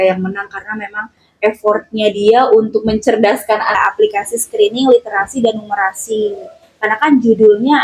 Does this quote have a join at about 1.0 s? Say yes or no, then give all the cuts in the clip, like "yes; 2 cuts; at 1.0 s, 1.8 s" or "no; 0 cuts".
no; 1 cut; at 3.8 s